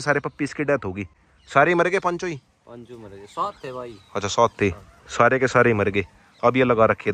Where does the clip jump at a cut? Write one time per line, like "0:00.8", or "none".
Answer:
none